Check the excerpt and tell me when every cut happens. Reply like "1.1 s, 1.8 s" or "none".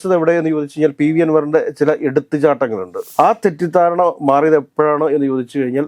2.9 s